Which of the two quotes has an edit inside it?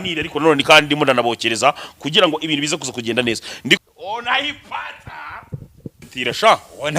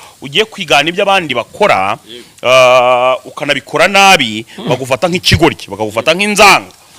first; 2 cuts; at 3.8 s, 6.0 s

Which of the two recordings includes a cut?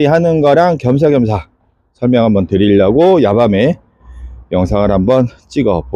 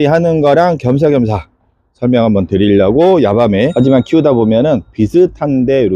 second; 1 cut; at 3.7 s

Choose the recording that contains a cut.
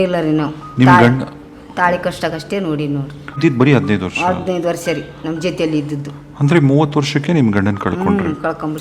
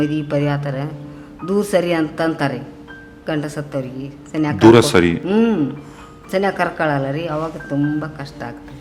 first; 1 cut; at 3.4 s

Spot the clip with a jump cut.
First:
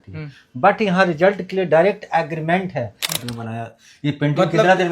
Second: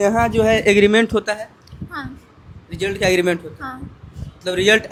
first; 1 cut; at 3.2 s

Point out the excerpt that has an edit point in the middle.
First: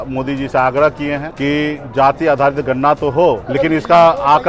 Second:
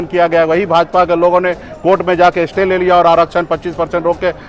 first; 2 cuts; at 1.3 s, 3.4 s

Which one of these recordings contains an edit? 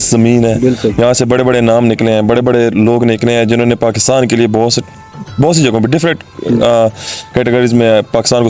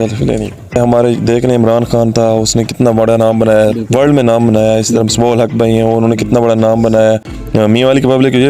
second; 2 cuts; at 0.8 s, 7.4 s

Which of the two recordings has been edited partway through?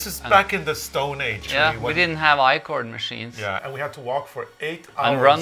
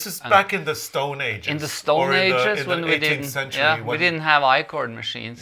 first; 2 cuts; at 1.4 s, 3.6 s

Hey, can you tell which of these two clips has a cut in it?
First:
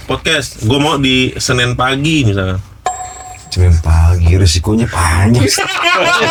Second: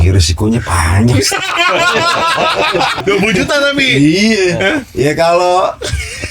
second; 1 cut; at 3.0 s

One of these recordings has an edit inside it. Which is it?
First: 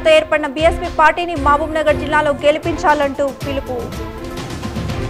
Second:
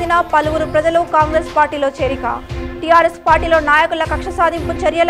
first; 1 cut; at 3.9 s

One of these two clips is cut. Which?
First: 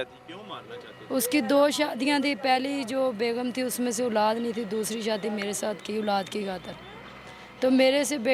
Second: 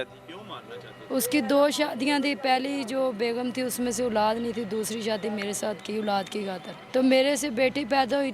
second; 1 cut; at 6.7 s

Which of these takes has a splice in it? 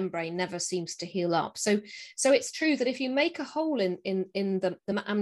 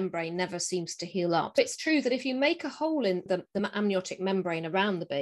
second; 2 cuts; at 1.6 s, 3.3 s

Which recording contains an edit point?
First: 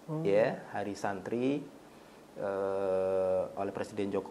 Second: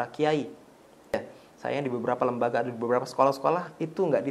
second; 1 cut; at 1.1 s

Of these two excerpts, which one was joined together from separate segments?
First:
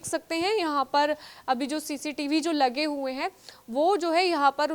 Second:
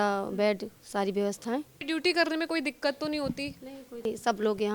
second; 2 cuts; at 1.8 s, 4.0 s

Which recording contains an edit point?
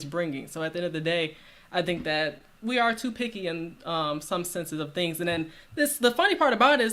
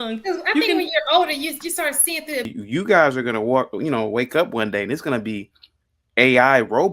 second; 1 cut; at 2.5 s

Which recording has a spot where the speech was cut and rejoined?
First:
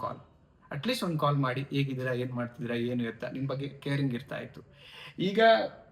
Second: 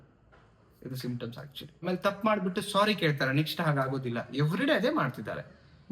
second; 1 cut; at 1.8 s

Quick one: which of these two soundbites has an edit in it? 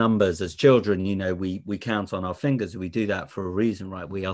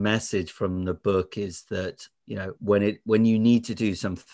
second; 1 cut; at 2.1 s

